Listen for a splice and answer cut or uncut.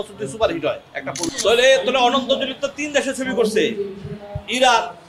cut